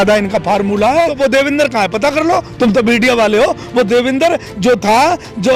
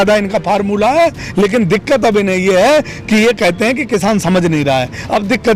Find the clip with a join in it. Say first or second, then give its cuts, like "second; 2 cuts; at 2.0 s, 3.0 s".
first; 1 cut; at 1.1 s